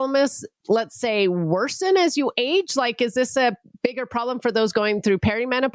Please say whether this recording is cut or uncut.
uncut